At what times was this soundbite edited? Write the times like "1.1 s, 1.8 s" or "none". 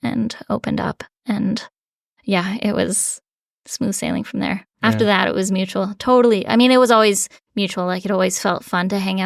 none